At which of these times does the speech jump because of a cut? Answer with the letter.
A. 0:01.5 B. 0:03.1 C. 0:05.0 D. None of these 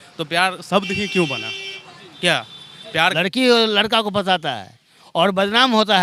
B